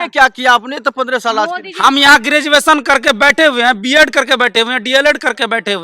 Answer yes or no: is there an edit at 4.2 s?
no